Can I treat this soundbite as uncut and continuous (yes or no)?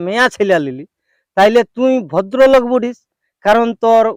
yes